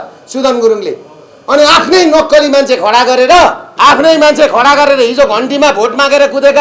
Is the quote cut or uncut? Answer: cut